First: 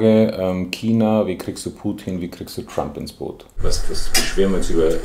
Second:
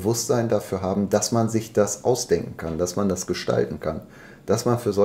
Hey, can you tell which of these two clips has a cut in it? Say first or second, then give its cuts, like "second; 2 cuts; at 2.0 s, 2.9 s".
first; 1 cut; at 3.6 s